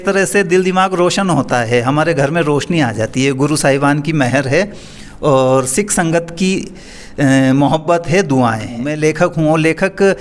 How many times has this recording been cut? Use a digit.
1